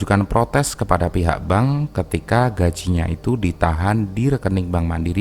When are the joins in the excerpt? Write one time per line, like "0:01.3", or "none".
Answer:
none